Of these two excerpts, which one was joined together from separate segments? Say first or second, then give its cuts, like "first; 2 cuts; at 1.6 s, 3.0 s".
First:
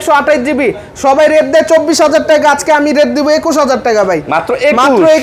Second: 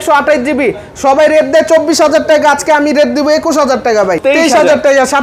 second; 1 cut; at 4.2 s